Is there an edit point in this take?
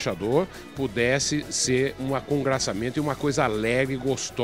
no; 0 cuts

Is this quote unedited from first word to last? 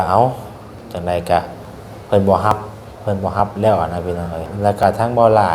no; 1 cut; at 4.5 s

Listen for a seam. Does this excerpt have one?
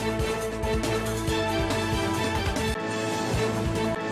yes; 2 cuts; at 1.1 s, 2.4 s

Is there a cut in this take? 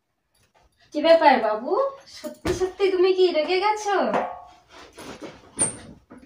no; 0 cuts

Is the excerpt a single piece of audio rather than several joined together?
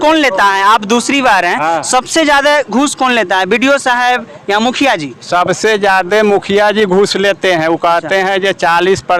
yes; 0 cuts

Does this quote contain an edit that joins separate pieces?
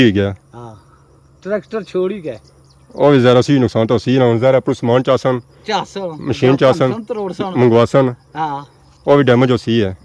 no; 0 cuts

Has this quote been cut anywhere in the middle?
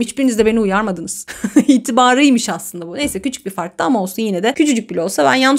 no; 0 cuts

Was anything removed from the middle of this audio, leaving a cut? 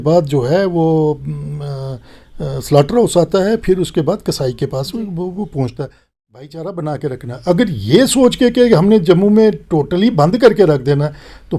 yes; 1 cut; at 6.1 s

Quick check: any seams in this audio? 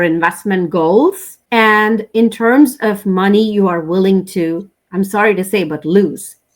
yes; 1 cut; at 1.3 s

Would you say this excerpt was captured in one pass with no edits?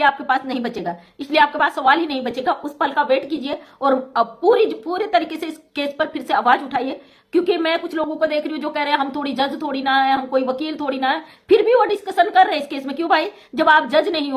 yes; 0 cuts

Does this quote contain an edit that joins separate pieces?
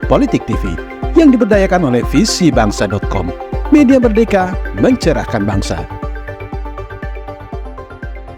no; 0 cuts

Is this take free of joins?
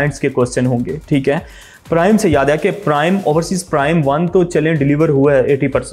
yes; 0 cuts

